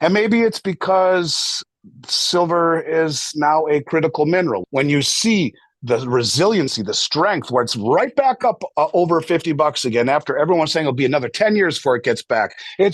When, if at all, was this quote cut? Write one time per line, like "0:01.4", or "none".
0:04.6